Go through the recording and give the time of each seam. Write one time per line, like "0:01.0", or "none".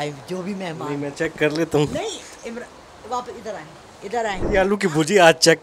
0:04.4